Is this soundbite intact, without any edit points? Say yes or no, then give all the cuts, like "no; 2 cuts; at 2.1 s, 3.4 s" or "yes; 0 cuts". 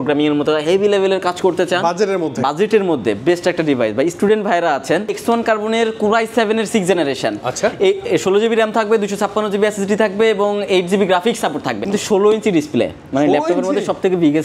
no; 2 cuts; at 5.2 s, 11.9 s